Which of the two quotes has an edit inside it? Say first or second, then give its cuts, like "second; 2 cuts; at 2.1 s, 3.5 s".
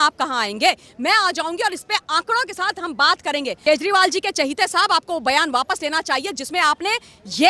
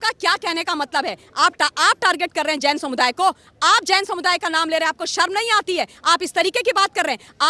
first; 1 cut; at 3.6 s